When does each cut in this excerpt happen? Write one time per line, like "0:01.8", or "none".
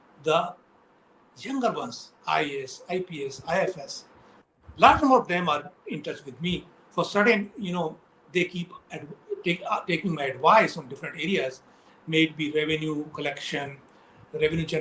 none